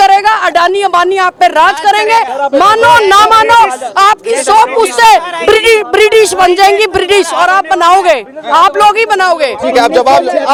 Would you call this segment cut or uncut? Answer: uncut